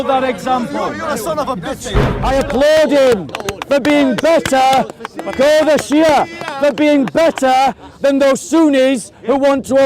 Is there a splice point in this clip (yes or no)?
yes